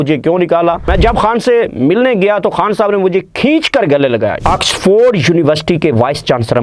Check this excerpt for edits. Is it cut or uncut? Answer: cut